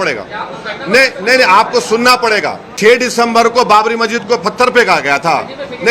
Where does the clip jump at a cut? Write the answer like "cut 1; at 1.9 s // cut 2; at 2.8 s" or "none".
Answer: cut 1; at 2.7 s